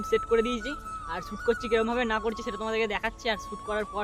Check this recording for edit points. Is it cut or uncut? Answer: uncut